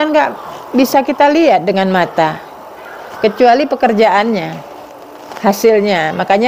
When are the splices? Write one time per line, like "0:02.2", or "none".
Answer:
none